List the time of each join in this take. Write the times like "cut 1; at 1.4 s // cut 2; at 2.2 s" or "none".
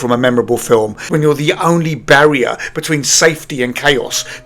cut 1; at 1.0 s